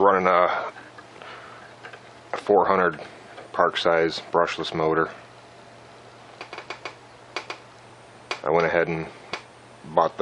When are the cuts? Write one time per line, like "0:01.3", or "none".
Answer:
0:04.6